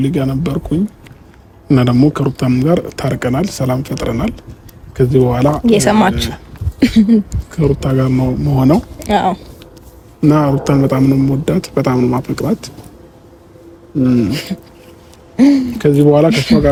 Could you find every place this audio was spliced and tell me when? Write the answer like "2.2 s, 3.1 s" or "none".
none